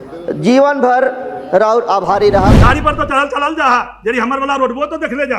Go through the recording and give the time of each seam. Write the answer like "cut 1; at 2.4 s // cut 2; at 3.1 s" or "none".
cut 1; at 2.5 s